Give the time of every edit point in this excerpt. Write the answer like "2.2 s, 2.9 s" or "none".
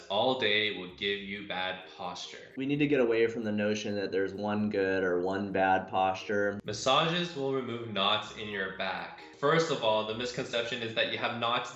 6.7 s